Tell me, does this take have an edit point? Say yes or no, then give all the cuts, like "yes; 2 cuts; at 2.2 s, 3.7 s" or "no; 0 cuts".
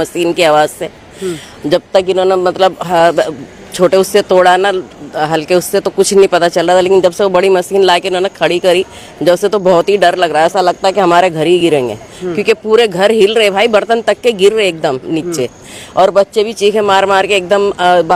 no; 0 cuts